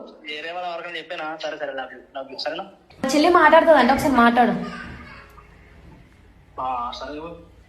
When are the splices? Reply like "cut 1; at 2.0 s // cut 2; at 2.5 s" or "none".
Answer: cut 1; at 3.0 s